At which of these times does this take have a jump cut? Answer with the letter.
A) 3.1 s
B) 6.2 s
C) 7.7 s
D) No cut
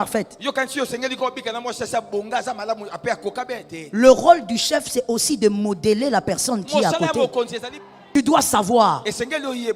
C